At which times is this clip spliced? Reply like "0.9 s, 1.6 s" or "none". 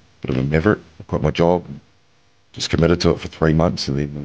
0.9 s